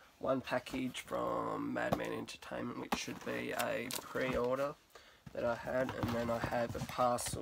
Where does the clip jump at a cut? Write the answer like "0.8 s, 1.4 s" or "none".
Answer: 4.3 s